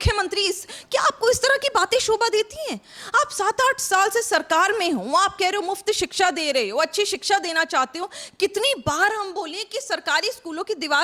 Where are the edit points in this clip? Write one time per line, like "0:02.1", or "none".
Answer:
none